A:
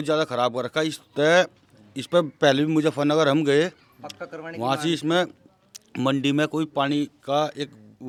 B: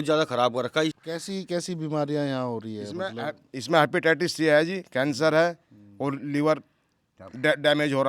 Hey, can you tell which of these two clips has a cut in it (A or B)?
B